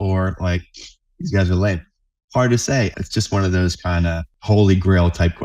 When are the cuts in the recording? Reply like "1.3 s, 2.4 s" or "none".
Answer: 2.9 s, 4.3 s